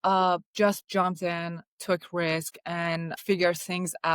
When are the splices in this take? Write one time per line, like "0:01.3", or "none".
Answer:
0:03.1